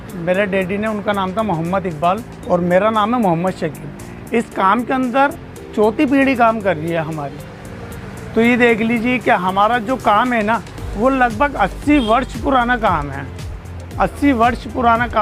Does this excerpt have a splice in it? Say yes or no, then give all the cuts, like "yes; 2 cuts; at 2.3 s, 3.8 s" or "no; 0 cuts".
no; 0 cuts